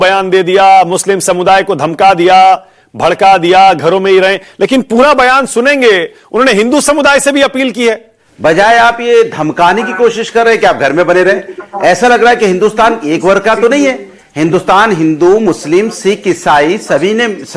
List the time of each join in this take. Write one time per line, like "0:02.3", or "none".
0:08.2